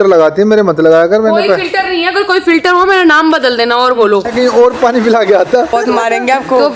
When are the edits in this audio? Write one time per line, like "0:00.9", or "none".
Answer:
0:04.3
0:05.7